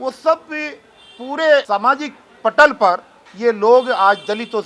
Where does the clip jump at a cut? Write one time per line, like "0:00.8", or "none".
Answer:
0:01.7

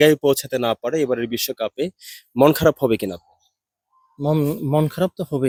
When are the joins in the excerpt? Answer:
none

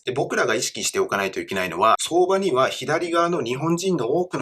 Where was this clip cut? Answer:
0:02.0

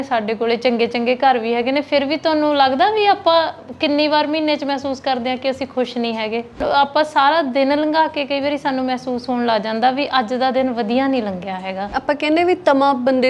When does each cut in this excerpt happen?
0:06.6
0:11.9

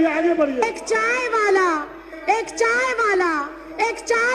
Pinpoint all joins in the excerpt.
none

